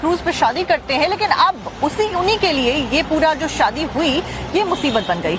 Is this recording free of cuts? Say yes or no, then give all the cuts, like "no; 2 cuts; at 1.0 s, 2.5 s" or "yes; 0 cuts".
yes; 0 cuts